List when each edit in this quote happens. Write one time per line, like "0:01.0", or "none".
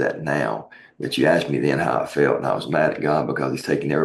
none